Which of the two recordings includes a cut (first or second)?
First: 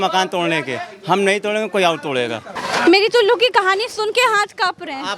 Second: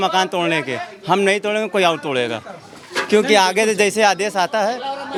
first